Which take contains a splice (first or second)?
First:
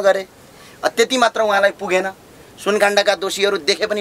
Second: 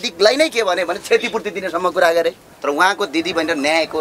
second